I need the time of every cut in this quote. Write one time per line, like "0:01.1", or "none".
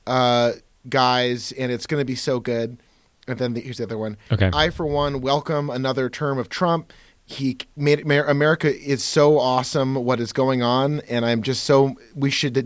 none